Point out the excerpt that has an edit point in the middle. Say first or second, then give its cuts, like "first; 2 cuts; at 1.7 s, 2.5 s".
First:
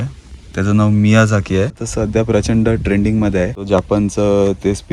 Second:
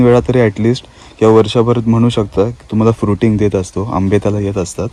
first; 2 cuts; at 1.9 s, 3.6 s